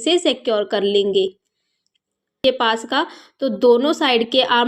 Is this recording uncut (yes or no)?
no